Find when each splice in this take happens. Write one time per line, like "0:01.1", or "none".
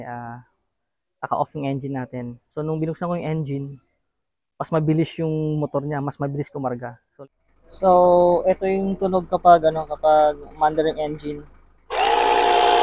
0:07.2